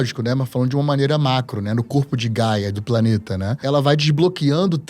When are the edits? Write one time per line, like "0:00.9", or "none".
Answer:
0:03.6